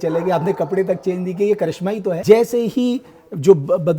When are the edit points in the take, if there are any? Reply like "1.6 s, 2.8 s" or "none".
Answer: 2.2 s